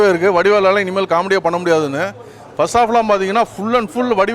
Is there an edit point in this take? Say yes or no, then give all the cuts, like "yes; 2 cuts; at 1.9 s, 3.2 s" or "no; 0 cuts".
no; 0 cuts